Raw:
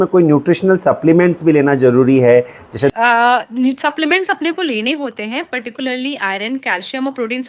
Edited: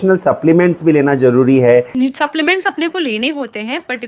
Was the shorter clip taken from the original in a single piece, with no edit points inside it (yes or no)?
no